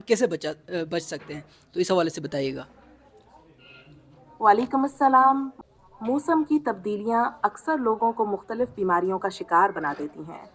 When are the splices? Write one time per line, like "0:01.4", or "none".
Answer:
0:05.5